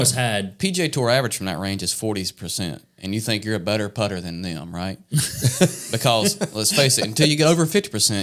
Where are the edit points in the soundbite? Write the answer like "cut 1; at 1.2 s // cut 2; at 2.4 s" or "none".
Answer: none

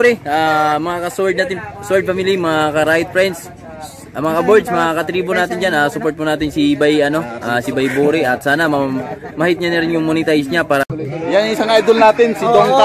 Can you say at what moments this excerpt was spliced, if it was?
cut 1; at 10.9 s

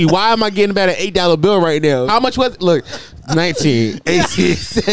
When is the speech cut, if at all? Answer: cut 1; at 2.1 s

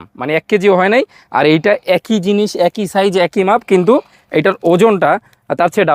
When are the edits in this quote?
none

